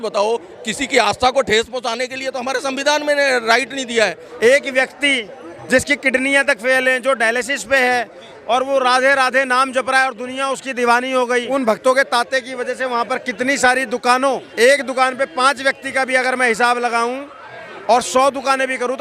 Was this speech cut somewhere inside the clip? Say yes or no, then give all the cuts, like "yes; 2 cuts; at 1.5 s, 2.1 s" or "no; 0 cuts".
yes; 3 cuts; at 4.3 s, 11.5 s, 14.5 s